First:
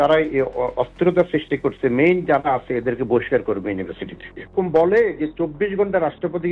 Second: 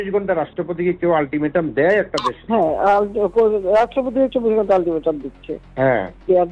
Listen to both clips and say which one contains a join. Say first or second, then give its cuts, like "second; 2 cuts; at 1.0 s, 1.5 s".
first; 1 cut; at 4.5 s